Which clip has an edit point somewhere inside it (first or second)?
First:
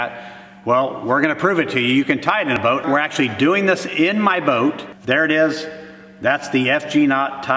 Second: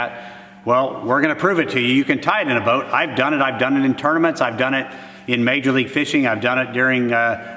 first